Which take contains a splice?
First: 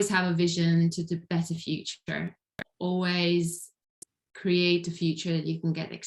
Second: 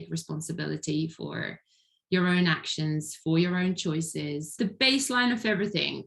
second; 1 cut; at 4.5 s

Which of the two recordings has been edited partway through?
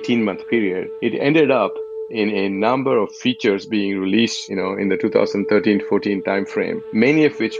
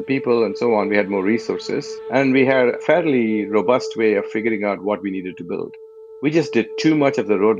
second; 2 cuts; at 2.8 s, 5.9 s

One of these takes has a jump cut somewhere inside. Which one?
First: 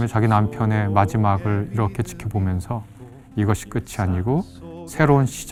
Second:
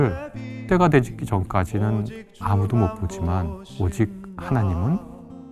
second; 1 cut; at 3.6 s

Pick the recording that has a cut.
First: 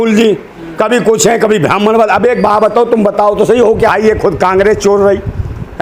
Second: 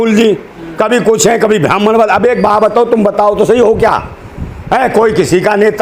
first; 1 cut; at 3.9 s

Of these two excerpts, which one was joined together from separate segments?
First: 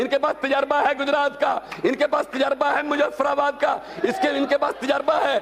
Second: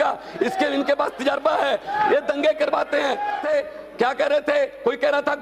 second; 1 cut; at 3.4 s

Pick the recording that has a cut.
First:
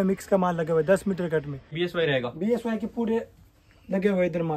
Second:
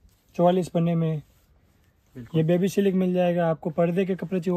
first; 1 cut; at 1.6 s

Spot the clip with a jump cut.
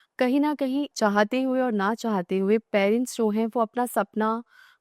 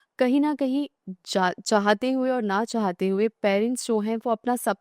first; 1 cut; at 0.9 s

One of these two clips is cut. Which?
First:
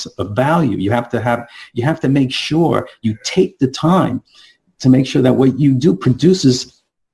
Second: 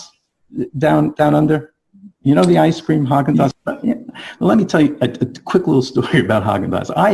second; 1 cut; at 3.5 s

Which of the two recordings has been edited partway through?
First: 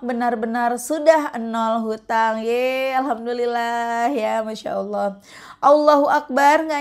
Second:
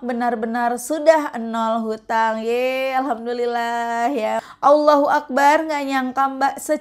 second; 1 cut; at 4.5 s

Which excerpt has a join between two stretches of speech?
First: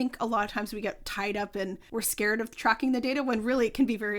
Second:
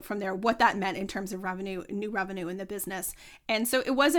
first; 1 cut; at 1.8 s

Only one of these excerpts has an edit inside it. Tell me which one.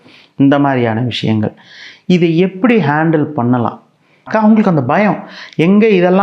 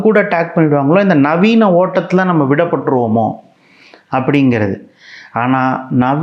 first; 1 cut; at 4.2 s

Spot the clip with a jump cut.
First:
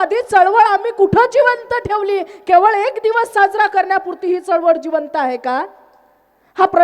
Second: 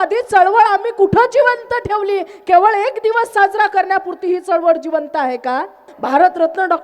second; 1 cut; at 5.9 s

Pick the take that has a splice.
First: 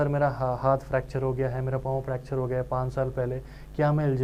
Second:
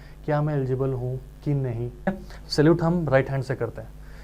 second; 1 cut; at 2.1 s

